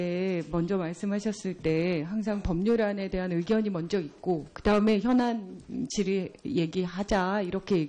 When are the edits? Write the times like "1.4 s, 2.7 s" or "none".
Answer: 3.1 s